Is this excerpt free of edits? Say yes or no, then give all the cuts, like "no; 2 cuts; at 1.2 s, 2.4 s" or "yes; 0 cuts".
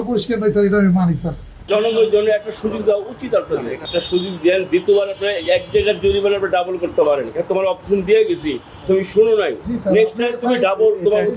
yes; 0 cuts